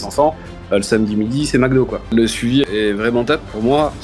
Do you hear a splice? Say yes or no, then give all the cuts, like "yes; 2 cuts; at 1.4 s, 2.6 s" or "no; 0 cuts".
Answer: yes; 1 cut; at 2.5 s